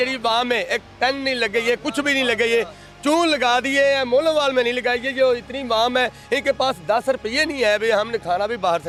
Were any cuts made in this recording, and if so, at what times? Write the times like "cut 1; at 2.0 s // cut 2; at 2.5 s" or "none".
none